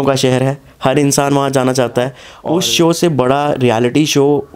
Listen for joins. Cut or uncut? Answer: cut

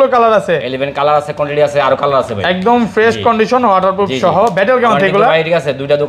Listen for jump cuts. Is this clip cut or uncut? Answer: uncut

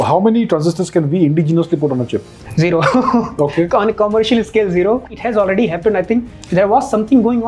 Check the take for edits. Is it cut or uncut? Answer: cut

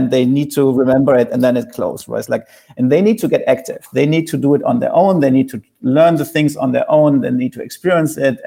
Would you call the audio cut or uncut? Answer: uncut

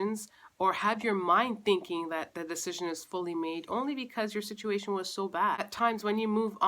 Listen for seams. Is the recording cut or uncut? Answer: cut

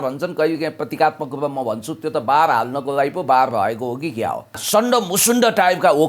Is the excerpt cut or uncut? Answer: cut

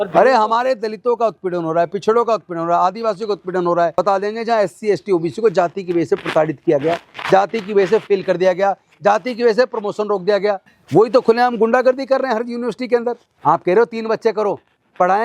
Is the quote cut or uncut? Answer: cut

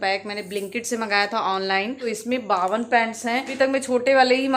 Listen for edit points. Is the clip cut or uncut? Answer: cut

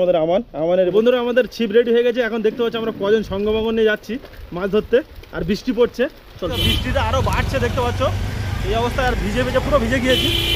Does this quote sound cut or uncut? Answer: cut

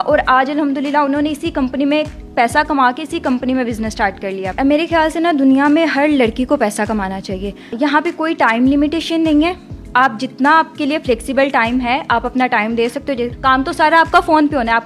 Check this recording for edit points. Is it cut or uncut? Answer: cut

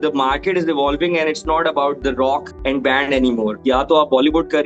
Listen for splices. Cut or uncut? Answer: cut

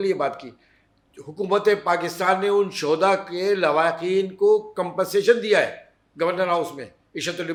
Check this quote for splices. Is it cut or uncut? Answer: uncut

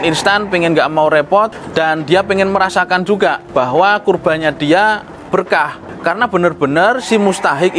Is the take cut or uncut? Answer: cut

